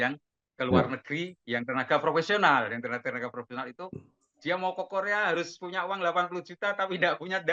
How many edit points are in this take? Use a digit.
0